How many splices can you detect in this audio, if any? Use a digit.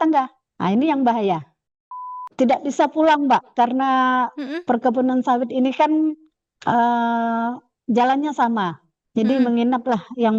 1